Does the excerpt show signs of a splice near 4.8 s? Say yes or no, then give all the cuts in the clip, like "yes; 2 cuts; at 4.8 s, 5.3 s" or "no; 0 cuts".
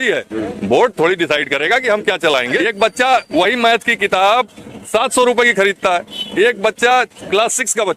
no; 1 cut; at 2.6 s